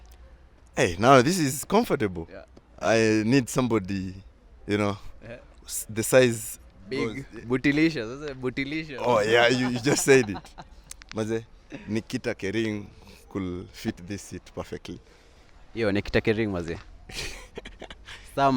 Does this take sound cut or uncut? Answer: uncut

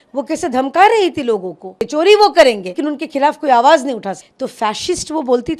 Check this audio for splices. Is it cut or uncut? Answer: cut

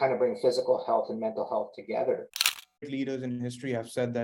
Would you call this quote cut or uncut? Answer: cut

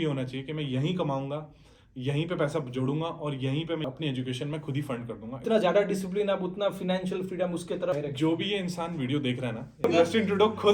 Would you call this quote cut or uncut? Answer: cut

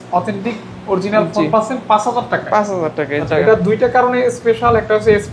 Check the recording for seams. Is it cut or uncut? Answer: cut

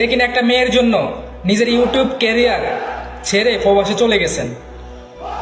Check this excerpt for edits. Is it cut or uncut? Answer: uncut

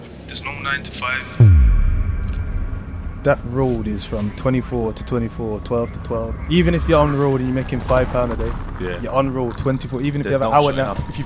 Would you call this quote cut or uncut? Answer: uncut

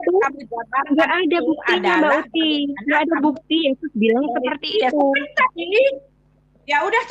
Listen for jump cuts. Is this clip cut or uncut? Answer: uncut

